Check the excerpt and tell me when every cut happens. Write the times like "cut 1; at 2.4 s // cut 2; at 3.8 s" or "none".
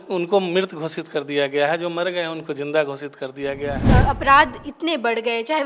cut 1; at 3.8 s